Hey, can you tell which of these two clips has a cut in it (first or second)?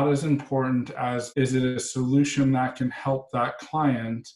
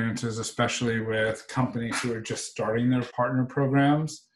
second